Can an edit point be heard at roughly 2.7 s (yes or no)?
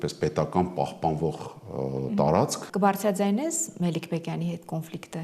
yes